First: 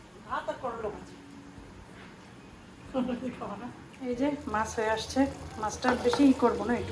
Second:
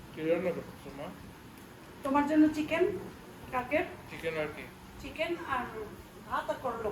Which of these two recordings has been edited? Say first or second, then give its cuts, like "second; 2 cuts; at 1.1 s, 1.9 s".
first; 1 cut; at 3.9 s